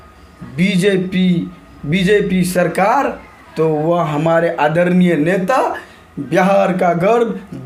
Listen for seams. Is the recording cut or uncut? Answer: uncut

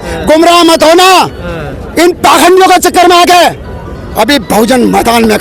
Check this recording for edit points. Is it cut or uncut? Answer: uncut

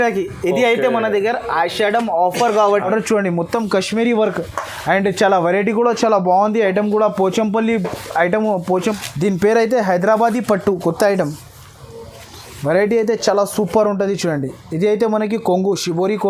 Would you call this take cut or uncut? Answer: cut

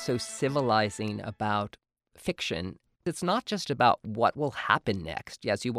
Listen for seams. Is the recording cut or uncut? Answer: cut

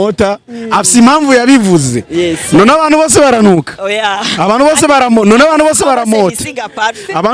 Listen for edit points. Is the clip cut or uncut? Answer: uncut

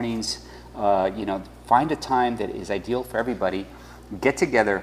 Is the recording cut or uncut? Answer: cut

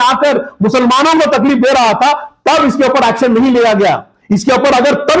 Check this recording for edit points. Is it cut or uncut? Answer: uncut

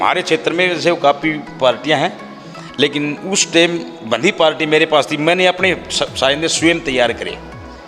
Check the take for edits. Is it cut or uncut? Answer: uncut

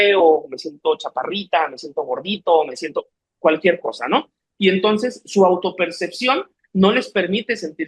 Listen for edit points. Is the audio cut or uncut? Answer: uncut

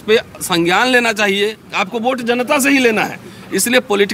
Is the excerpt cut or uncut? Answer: cut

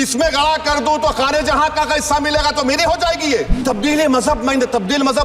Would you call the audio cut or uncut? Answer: cut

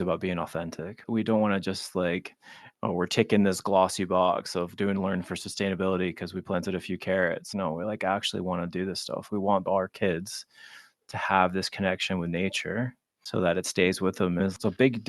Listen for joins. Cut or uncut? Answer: cut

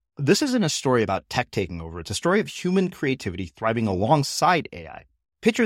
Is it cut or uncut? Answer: uncut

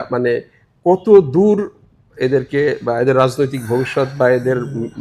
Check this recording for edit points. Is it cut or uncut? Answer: uncut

